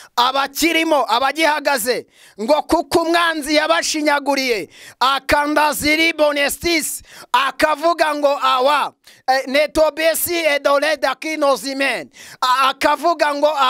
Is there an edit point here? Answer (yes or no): no